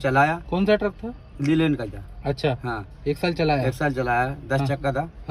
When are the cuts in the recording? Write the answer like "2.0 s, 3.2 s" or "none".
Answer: none

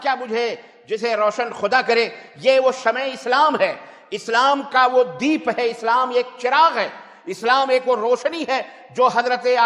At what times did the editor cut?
none

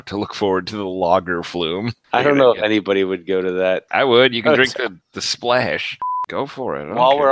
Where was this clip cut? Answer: 2.0 s, 3.8 s, 6.2 s

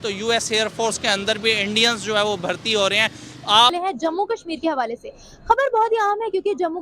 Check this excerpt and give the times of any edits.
3.7 s

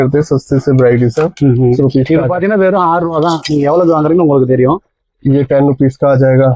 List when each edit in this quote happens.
1.8 s

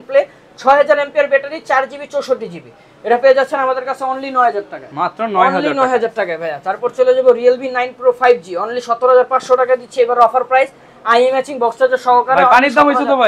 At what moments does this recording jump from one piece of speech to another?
none

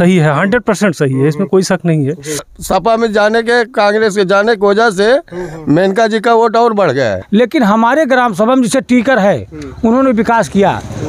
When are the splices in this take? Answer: 2.5 s, 7.2 s

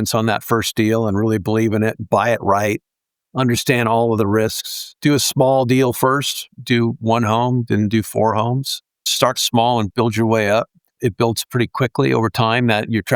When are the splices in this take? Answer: none

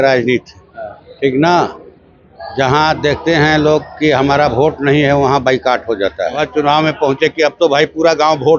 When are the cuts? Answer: 6.5 s

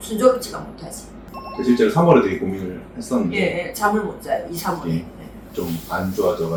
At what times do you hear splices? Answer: none

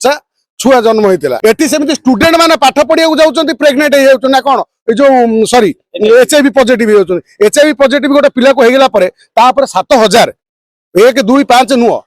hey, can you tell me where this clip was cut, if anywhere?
1.4 s

